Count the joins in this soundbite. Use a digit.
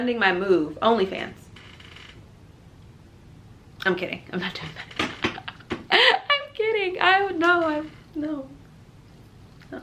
0